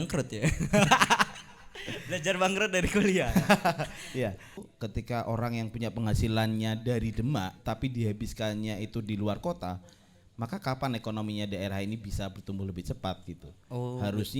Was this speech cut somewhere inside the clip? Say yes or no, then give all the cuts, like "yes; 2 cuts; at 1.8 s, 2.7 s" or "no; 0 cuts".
yes; 1 cut; at 4.7 s